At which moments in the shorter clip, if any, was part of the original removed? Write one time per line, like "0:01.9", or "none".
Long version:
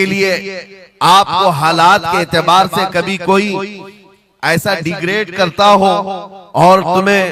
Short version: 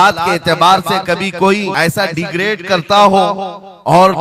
0:01.7